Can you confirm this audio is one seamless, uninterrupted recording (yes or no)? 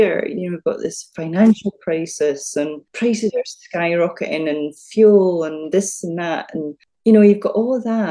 no